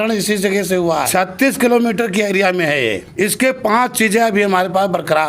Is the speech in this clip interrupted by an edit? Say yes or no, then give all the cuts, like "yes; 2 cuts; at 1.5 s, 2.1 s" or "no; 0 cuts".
yes; 2 cuts; at 1.1 s, 3.0 s